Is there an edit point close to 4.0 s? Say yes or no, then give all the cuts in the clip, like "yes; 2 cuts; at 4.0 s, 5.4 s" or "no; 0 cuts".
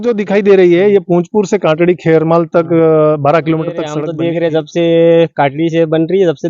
yes; 1 cut; at 4.0 s